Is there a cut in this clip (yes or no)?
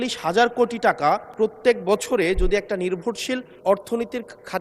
yes